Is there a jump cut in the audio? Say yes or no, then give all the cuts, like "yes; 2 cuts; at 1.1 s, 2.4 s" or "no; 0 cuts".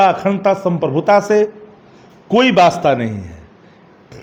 no; 0 cuts